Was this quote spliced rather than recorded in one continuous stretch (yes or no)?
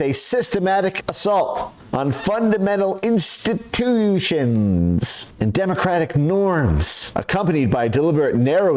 yes